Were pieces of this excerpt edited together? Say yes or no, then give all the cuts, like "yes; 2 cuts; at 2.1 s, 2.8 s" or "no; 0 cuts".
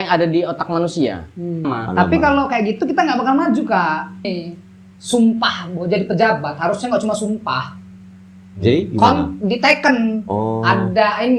yes; 2 cuts; at 1.7 s, 4.4 s